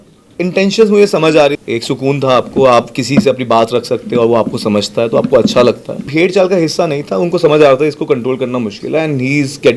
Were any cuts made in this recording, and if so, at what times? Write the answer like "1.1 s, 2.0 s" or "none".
1.6 s, 6.0 s